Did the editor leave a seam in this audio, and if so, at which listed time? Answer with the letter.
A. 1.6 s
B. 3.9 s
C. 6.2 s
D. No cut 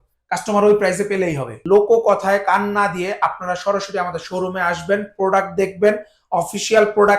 A